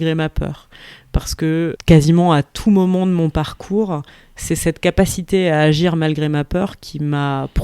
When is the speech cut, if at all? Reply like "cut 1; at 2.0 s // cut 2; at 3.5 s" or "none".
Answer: cut 1; at 1.8 s